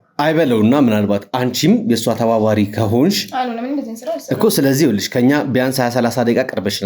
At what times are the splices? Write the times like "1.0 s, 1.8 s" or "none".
none